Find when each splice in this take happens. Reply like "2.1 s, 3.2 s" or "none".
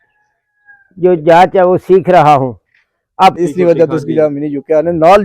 3.4 s